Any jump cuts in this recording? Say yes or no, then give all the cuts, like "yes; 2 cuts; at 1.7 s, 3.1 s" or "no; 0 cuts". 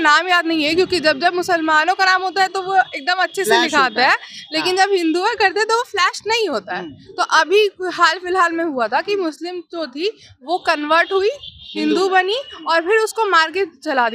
no; 0 cuts